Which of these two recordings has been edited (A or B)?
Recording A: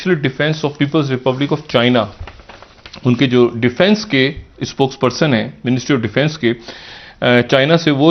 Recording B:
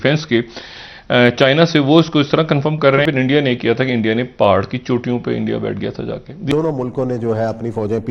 B